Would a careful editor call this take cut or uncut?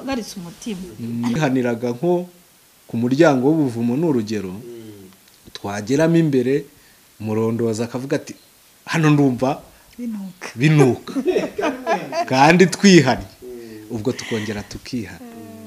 cut